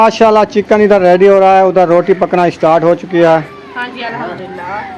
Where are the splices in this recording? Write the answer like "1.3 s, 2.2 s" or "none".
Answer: none